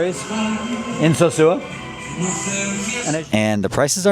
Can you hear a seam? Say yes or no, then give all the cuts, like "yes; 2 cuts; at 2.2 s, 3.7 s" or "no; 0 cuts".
yes; 1 cut; at 3.0 s